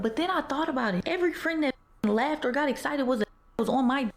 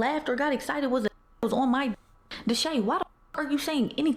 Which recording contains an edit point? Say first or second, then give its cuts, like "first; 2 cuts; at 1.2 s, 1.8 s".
first; 1 cut; at 1.0 s